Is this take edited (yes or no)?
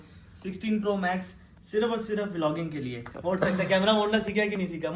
yes